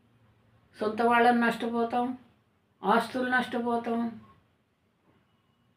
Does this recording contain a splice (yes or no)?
no